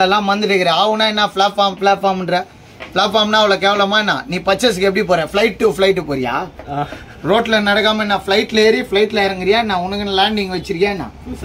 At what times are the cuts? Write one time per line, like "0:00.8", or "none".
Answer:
none